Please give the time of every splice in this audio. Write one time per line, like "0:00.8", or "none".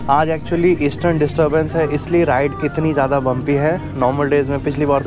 none